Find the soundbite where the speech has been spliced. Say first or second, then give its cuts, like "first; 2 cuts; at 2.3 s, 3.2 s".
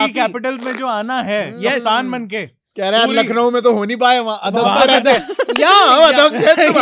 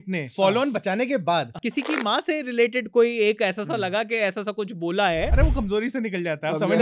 second; 1 cut; at 1.6 s